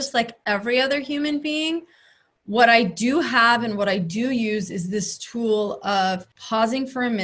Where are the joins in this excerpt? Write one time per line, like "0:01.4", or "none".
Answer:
0:06.3